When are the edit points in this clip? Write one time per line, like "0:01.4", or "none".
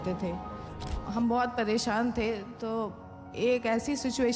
0:01.0